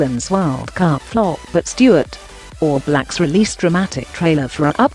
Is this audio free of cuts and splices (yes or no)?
yes